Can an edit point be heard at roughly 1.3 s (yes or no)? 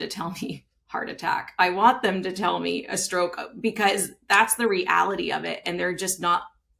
no